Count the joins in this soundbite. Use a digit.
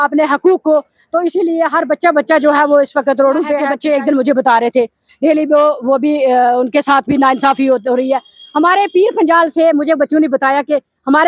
1